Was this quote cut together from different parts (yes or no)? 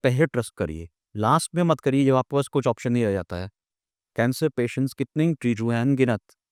no